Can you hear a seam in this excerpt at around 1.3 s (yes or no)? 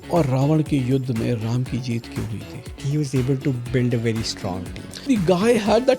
no